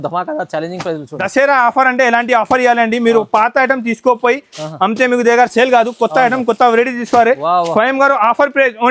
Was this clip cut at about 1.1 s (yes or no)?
yes